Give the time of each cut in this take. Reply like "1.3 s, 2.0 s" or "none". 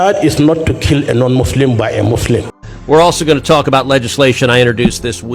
2.7 s